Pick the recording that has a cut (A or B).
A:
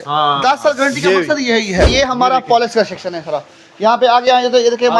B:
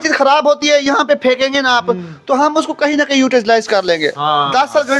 A